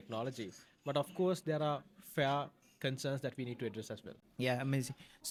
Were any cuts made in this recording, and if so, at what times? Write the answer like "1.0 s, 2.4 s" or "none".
none